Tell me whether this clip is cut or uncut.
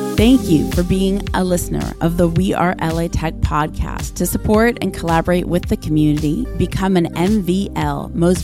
uncut